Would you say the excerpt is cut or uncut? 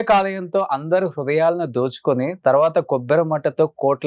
uncut